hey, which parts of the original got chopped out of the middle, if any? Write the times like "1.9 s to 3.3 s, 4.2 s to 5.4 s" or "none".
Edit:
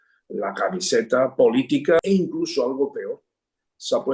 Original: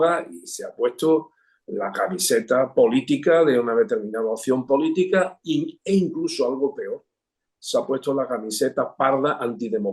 3.4 s to 5.8 s